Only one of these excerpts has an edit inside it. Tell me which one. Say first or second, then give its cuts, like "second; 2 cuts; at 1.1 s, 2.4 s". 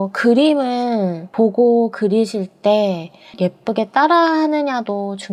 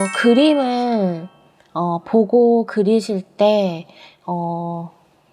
first; 2 cuts; at 1.3 s, 3.3 s